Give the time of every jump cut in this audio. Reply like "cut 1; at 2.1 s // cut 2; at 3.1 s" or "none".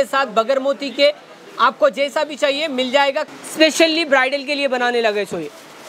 cut 1; at 3.3 s